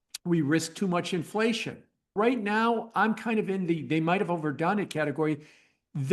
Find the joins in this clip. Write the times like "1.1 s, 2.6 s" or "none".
2.1 s